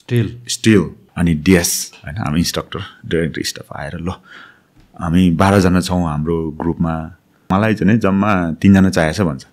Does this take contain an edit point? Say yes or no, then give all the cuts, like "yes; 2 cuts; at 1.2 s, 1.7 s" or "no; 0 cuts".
yes; 2 cuts; at 1.0 s, 7.5 s